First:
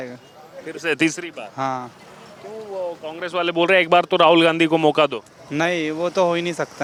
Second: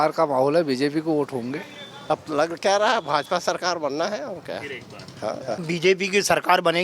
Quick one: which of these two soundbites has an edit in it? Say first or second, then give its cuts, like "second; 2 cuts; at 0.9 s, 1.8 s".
second; 2 cuts; at 2.1 s, 5.6 s